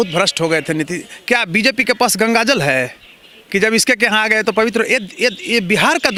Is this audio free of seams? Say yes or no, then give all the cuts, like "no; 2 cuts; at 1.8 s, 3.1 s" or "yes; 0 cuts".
yes; 0 cuts